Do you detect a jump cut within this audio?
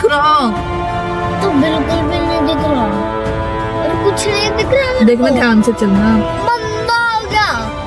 no; 0 cuts

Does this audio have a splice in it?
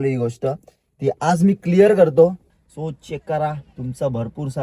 yes; 1 cut; at 2.5 s

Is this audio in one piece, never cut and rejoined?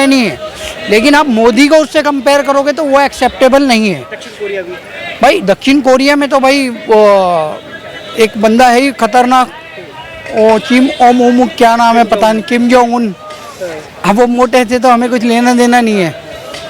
yes; 0 cuts

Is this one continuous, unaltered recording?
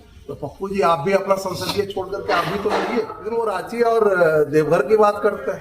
no; 1 cut; at 3.2 s

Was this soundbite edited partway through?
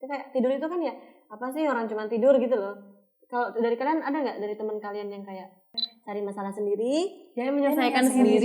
yes; 1 cut; at 5.8 s

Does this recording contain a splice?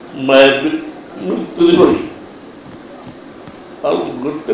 no; 0 cuts

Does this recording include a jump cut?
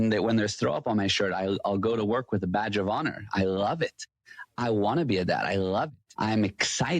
yes; 1 cut; at 6.0 s

